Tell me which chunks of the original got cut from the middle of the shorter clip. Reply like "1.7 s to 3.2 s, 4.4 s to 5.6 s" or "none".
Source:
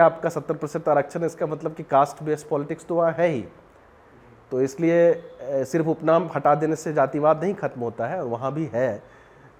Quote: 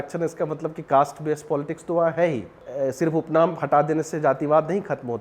3.6 s to 5.3 s